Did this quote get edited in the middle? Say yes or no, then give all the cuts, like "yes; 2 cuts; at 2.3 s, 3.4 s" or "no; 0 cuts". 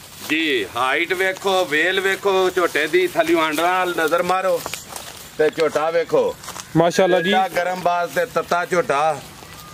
no; 0 cuts